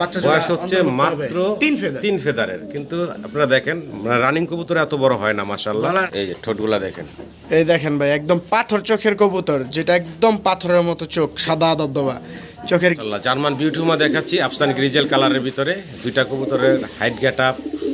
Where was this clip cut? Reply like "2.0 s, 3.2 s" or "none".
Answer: 6.1 s, 13.0 s